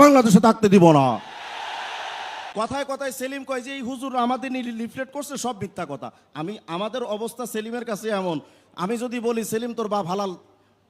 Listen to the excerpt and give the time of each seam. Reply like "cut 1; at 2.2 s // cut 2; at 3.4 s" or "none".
cut 1; at 2.4 s